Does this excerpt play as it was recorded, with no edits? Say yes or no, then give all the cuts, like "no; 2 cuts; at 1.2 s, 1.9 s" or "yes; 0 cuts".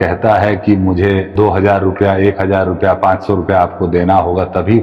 no; 1 cut; at 1.3 s